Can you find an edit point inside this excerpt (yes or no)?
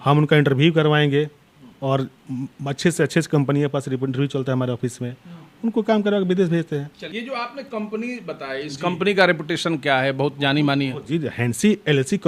no